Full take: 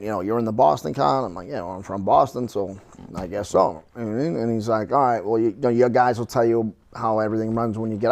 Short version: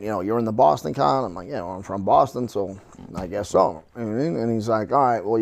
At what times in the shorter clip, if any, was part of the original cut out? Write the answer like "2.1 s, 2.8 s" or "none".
none